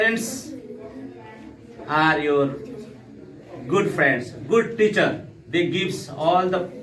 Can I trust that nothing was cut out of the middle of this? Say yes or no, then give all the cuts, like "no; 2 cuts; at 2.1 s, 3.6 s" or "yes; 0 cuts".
yes; 0 cuts